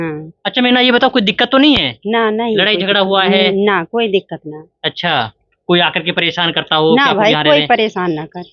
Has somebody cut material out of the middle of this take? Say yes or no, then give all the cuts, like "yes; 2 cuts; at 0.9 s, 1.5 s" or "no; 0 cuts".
no; 0 cuts